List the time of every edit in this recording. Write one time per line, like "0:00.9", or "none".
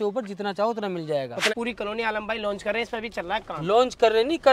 0:01.5